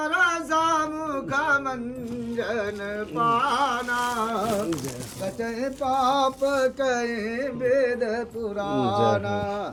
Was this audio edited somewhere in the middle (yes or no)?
no